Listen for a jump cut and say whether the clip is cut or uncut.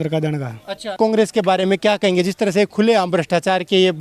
cut